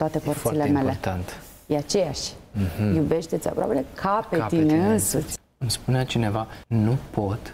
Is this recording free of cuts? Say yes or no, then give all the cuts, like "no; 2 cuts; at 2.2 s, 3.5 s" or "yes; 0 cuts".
no; 2 cuts; at 5.3 s, 6.6 s